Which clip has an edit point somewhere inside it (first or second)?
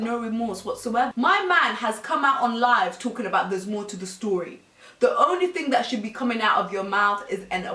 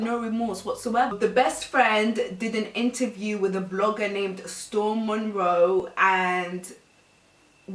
second